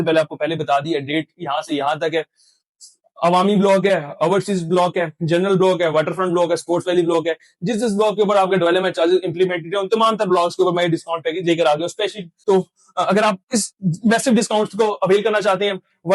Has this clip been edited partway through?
yes; 1 cut; at 12.3 s

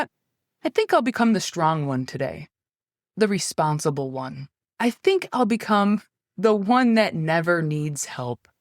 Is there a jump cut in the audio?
yes; 2 cuts; at 3.1 s, 4.7 s

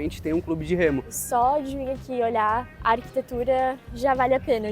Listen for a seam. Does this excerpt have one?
yes; 2 cuts; at 1.2 s, 2.7 s

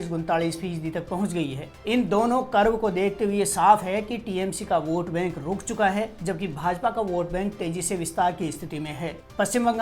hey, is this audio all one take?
yes; 0 cuts

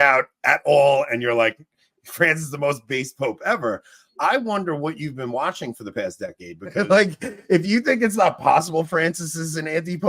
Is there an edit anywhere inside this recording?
yes; 1 cut; at 6.8 s

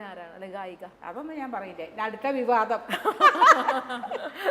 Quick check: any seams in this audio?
yes; 1 cut; at 0.9 s

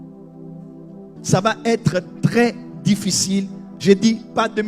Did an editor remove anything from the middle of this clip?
yes; 1 cut; at 1.1 s

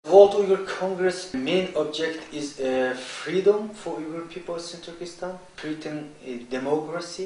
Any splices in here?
yes; 1 cut; at 0.9 s

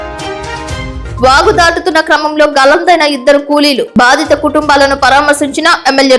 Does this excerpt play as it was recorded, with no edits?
no; 1 cut; at 1.0 s

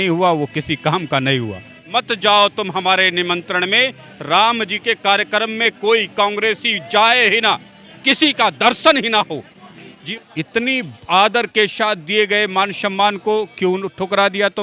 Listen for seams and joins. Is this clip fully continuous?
no; 2 cuts; at 1.8 s, 10.1 s

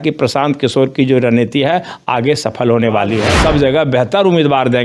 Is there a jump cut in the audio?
yes; 1 cut; at 3.3 s

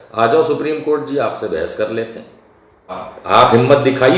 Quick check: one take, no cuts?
no; 1 cut; at 3.1 s

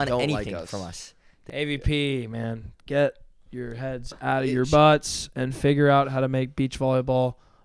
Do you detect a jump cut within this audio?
yes; 1 cut; at 1.4 s

